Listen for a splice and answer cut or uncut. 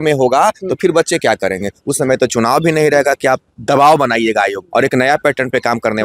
cut